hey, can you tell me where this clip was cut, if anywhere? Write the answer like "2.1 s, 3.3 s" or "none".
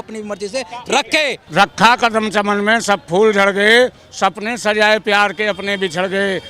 1.4 s